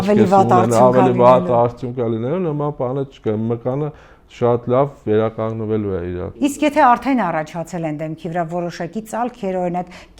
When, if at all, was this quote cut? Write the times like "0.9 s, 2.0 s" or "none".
none